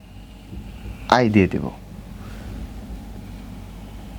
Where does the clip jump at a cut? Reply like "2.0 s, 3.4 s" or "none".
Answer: none